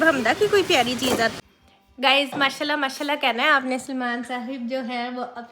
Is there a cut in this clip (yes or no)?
yes